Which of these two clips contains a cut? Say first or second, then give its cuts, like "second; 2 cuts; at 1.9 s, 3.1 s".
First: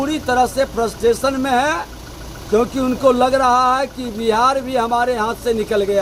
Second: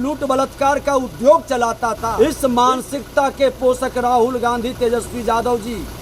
second; 1 cut; at 2.1 s